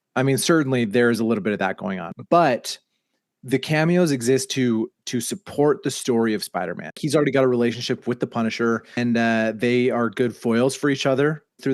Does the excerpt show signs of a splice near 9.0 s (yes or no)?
yes